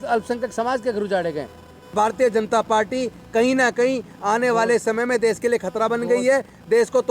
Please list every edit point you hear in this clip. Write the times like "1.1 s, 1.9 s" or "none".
1.9 s